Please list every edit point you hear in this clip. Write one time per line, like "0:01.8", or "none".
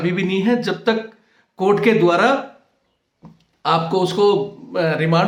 none